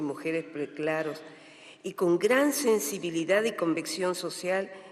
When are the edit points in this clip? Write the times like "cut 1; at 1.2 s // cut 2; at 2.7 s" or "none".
cut 1; at 3.9 s